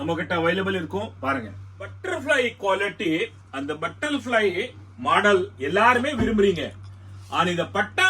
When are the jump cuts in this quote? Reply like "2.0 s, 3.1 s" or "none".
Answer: 2.0 s